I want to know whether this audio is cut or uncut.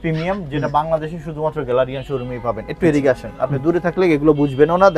uncut